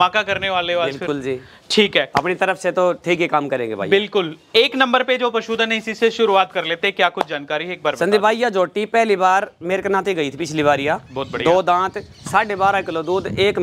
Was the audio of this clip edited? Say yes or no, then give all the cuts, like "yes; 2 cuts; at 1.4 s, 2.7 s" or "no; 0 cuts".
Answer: no; 0 cuts